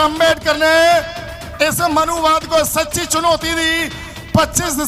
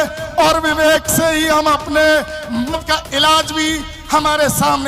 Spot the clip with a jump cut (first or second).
second